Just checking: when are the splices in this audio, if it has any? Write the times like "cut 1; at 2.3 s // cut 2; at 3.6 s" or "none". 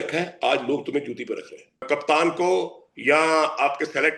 cut 1; at 1.9 s